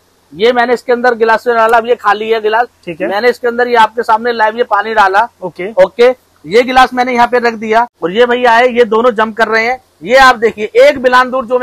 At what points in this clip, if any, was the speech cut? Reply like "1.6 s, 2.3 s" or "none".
8.0 s